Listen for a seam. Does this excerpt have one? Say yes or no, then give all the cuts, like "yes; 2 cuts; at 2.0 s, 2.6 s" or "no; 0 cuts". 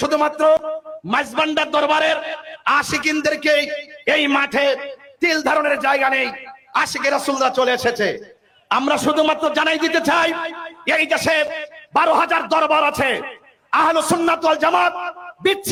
no; 0 cuts